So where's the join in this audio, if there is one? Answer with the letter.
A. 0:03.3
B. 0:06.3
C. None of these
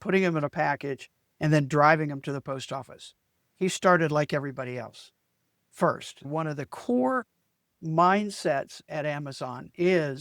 B